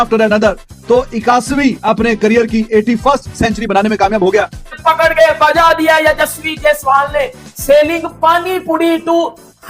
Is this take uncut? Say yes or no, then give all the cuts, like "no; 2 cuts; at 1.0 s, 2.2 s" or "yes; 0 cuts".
no; 1 cut; at 4.6 s